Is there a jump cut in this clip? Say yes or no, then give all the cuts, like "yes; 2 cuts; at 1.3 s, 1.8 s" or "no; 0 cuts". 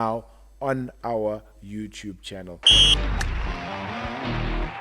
yes; 1 cut; at 2.6 s